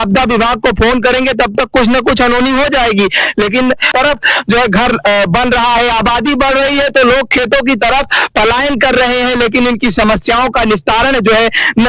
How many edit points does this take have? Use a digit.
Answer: 1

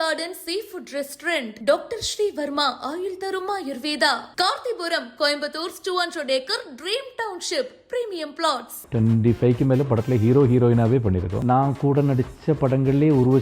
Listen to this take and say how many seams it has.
2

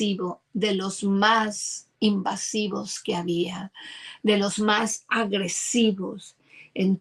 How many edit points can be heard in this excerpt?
0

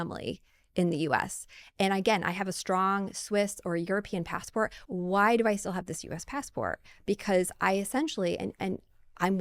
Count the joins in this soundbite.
1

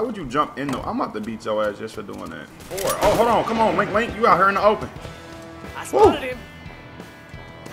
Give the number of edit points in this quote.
1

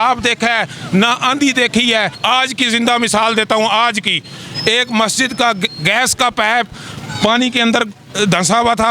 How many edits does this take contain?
1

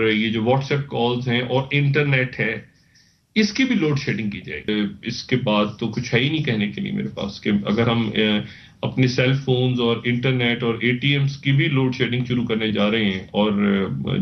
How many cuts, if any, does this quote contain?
1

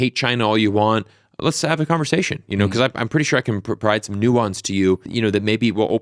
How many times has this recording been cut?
1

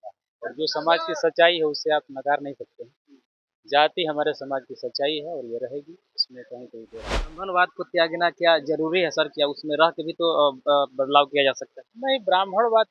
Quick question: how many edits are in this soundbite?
1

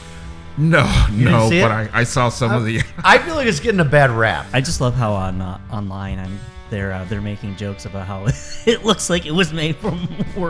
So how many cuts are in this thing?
1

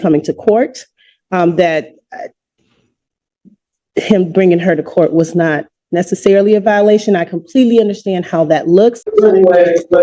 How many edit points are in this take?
1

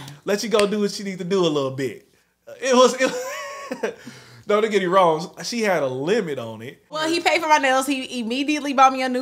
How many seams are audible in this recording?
1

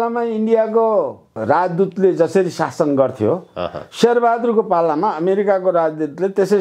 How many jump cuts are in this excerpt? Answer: 0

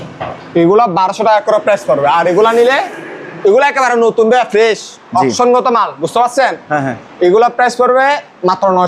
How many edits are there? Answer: 0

